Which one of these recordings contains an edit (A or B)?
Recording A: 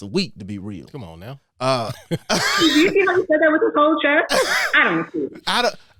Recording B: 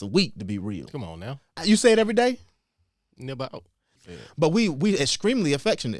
B